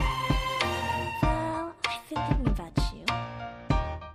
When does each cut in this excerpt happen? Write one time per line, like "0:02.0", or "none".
none